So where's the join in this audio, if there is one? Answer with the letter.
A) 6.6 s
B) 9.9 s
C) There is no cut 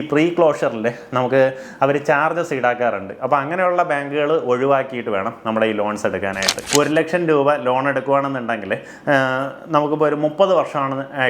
A